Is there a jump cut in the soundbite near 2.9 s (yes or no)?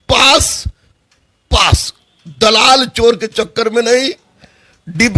no